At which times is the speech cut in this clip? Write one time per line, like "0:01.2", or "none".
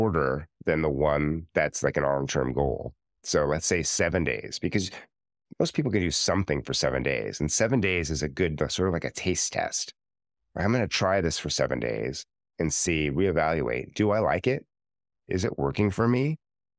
0:03.2